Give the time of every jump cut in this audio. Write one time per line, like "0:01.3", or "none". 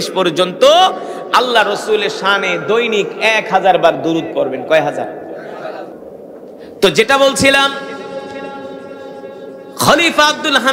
0:05.9